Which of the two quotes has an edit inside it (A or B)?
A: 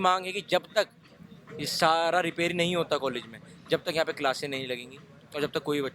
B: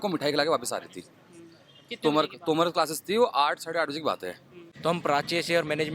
B